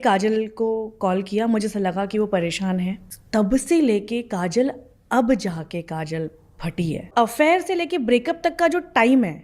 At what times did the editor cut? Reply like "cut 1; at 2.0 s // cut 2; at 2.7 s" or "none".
cut 1; at 3.1 s // cut 2; at 7.1 s